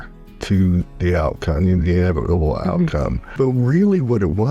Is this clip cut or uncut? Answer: cut